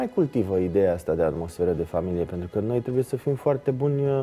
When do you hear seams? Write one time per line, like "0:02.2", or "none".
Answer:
none